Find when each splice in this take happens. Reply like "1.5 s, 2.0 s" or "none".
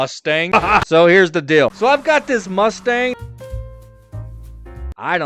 1.7 s